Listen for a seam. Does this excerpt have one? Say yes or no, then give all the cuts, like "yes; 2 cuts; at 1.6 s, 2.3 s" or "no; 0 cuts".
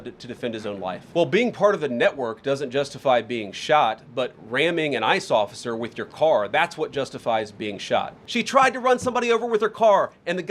yes; 2 cuts; at 1.0 s, 8.2 s